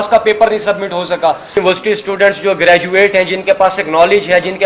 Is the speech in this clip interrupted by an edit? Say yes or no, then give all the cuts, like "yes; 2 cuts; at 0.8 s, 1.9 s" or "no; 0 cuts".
yes; 1 cut; at 1.5 s